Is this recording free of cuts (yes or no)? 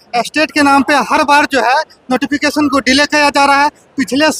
yes